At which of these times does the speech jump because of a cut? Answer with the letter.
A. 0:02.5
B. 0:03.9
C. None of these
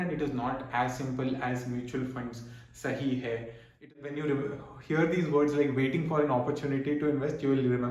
B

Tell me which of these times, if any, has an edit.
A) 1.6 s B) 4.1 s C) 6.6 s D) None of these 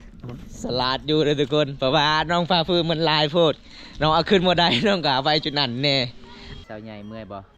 C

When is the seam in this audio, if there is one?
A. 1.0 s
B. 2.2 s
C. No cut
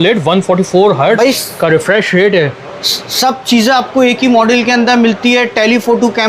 C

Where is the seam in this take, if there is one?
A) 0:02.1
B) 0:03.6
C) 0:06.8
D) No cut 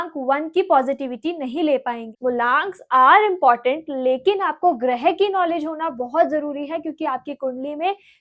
A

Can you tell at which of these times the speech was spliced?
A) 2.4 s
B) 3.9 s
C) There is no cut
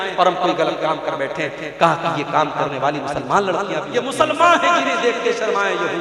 B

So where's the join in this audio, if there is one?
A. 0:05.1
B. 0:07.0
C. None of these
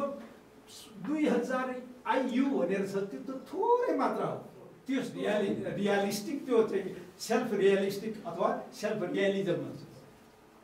A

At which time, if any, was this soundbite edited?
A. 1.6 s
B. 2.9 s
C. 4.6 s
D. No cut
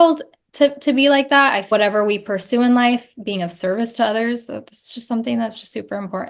A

